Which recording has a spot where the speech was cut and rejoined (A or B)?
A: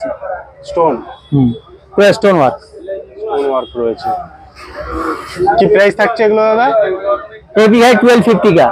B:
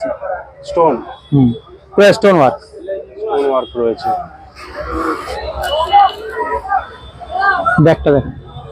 B